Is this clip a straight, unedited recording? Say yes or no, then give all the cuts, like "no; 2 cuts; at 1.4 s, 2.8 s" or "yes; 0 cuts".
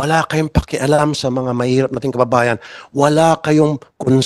yes; 0 cuts